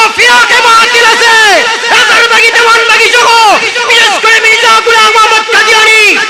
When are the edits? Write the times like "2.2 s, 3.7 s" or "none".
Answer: none